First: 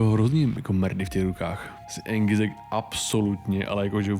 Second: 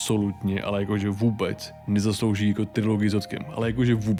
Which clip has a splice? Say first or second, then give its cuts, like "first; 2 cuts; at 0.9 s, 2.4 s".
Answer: first; 1 cut; at 1.8 s